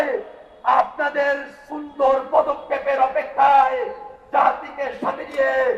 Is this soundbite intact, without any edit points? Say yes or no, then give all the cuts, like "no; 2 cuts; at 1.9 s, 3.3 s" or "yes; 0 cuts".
yes; 0 cuts